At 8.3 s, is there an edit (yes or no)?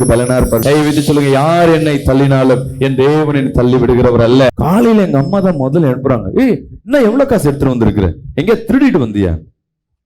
no